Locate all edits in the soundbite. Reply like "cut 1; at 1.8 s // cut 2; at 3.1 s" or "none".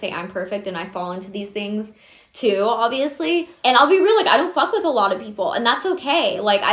cut 1; at 3.5 s